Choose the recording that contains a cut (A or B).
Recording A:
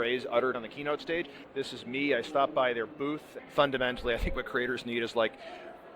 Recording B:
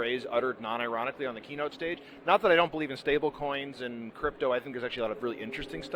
A